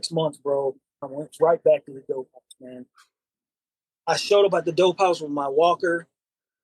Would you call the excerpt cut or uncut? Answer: cut